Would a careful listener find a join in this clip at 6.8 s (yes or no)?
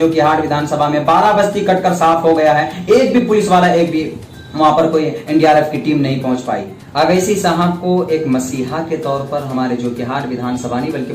yes